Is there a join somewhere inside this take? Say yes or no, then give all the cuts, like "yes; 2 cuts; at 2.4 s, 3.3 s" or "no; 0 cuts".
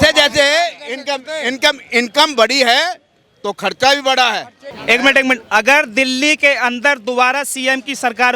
yes; 1 cut; at 4.7 s